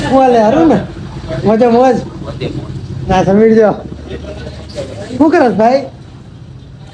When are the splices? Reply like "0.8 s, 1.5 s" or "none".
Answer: none

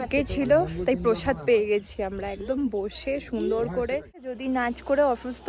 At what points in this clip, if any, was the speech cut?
4.3 s

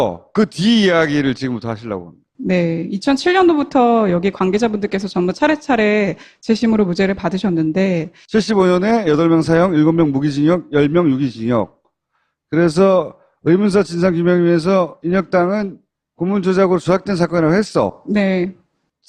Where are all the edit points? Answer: none

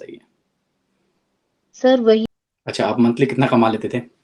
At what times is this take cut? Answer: 2.2 s

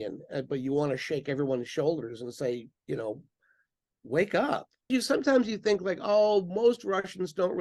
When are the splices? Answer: 4.9 s

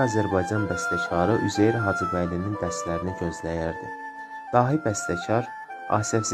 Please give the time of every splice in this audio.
none

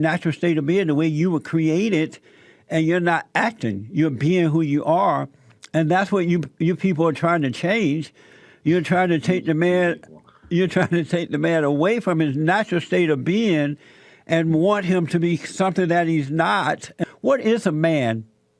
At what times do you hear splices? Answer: 17.0 s

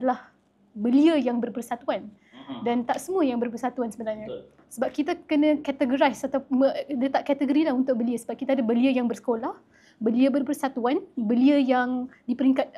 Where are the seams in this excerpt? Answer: none

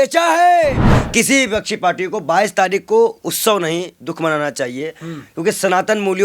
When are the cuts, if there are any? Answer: 0.9 s

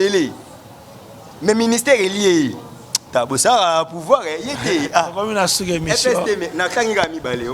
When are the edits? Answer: none

